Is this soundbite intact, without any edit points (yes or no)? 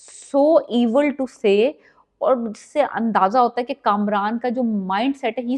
yes